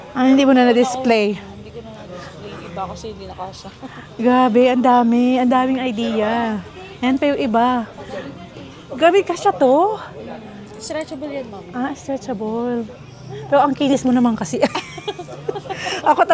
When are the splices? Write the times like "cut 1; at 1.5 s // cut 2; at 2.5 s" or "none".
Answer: none